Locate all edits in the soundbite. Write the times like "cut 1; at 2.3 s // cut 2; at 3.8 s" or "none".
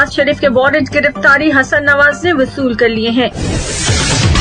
cut 1; at 3.3 s